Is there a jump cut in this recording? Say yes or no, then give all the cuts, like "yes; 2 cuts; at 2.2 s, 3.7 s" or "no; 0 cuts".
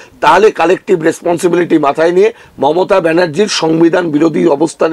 no; 0 cuts